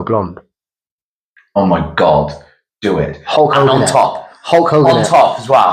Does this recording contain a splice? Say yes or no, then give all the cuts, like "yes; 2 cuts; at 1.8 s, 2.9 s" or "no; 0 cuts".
no; 0 cuts